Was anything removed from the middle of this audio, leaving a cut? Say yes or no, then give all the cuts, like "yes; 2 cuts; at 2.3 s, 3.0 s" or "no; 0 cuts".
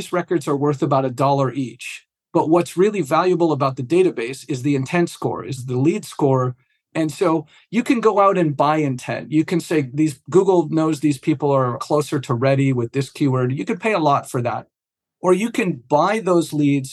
yes; 2 cuts; at 5.6 s, 6.8 s